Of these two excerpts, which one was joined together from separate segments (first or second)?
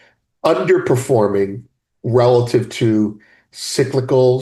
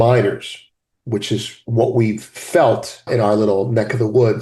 second